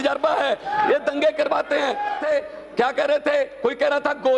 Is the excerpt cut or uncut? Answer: cut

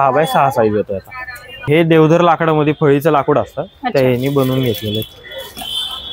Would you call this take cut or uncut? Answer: cut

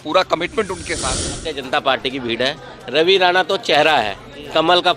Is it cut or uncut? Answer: cut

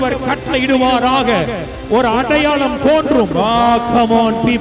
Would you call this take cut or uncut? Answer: uncut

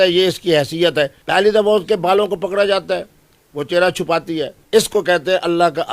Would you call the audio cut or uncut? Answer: cut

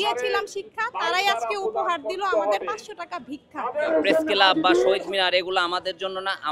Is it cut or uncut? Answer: cut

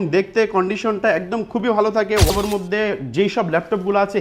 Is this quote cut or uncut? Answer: cut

